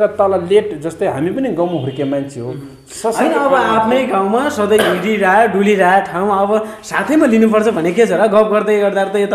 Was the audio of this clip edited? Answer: no; 0 cuts

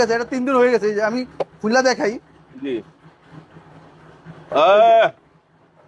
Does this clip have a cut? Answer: no; 0 cuts

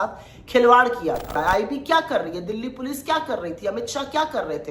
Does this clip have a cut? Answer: yes; 1 cut; at 1.4 s

